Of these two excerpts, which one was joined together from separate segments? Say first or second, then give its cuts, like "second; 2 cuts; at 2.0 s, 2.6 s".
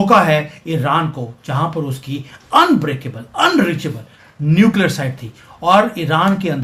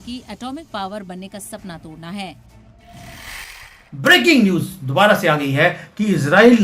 second; 1 cut; at 3.2 s